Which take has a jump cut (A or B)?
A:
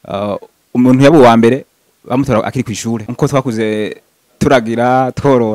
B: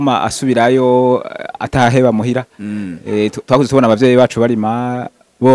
A